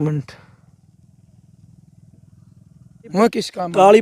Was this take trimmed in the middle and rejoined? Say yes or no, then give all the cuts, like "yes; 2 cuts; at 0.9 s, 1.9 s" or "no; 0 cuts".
yes; 1 cut; at 3.1 s